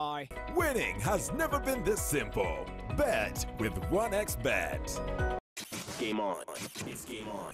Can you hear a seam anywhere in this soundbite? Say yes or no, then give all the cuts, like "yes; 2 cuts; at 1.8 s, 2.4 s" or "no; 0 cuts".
yes; 1 cut; at 5.3 s